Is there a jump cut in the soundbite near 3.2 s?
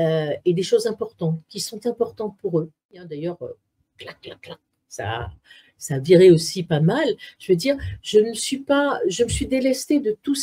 yes; 1 cut; at 3.2 s

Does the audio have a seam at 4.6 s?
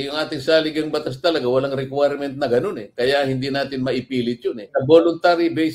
yes; 1 cut; at 4.6 s

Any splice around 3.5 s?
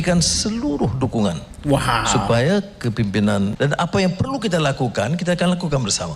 yes; 1 cut; at 3.5 s

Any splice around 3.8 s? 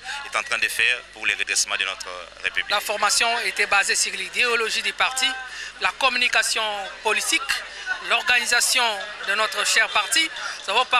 no; 1 cut; at 2.6 s

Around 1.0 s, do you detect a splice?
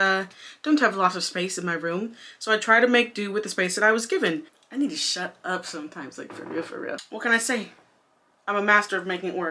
no; 2 cuts; at 4.5 s, 6.9 s

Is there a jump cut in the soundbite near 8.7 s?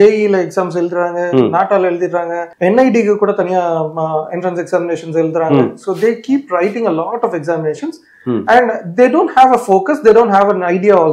no; 1 cut; at 2.4 s

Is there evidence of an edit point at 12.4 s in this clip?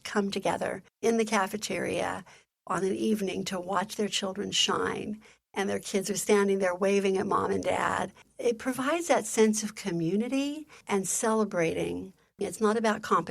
yes; 4 cuts; at 0.9 s, 8.3 s, 10.7 s, 12.4 s

